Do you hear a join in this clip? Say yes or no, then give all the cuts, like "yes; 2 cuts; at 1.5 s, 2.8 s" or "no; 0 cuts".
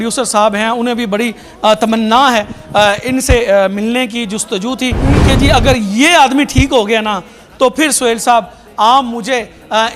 no; 0 cuts